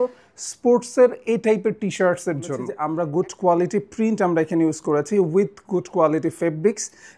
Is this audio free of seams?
no; 1 cut; at 2.7 s

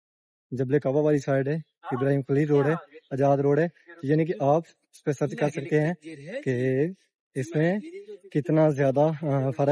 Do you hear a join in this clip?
no; 0 cuts

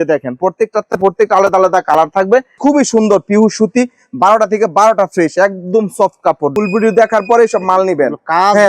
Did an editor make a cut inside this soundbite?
yes; 2 cuts; at 2.5 s, 6.5 s

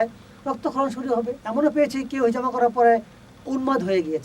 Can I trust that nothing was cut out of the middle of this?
no; 1 cut; at 1.4 s

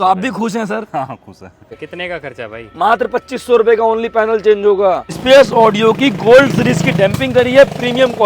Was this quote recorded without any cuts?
no; 2 cuts; at 1.8 s, 5.1 s

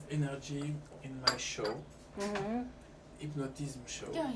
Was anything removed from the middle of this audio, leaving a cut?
no; 0 cuts

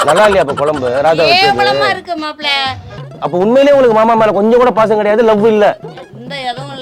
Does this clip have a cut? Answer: yes; 1 cut; at 3.0 s

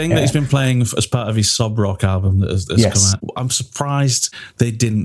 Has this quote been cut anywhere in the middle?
no; 0 cuts

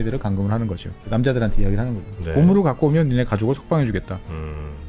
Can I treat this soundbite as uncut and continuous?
no; 1 cut; at 1.1 s

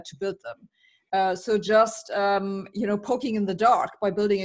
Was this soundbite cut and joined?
no; 0 cuts

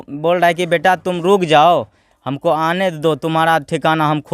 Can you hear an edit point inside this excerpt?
no; 0 cuts

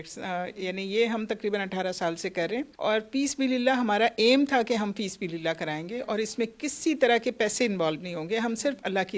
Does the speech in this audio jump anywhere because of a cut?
yes; 1 cut; at 2.7 s

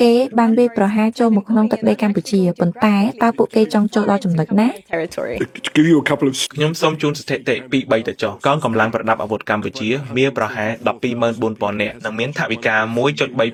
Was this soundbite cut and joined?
no; 0 cuts

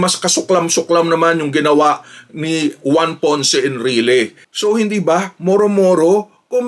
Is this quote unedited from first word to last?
no; 1 cut; at 4.4 s

